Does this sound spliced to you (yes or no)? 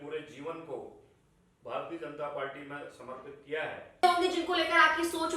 yes